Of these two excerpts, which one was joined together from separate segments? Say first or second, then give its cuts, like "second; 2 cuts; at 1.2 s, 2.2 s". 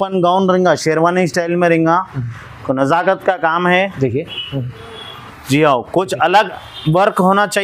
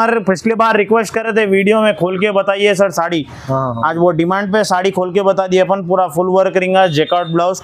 first; 1 cut; at 5.3 s